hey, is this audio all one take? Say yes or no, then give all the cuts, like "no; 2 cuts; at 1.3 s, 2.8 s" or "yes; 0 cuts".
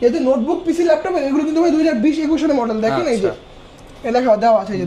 yes; 0 cuts